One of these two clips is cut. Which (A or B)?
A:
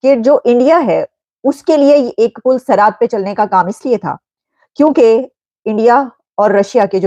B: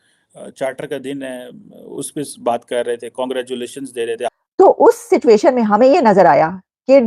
B